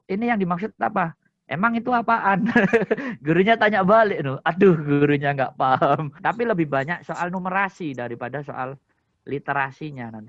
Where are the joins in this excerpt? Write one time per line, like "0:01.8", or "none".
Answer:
0:06.1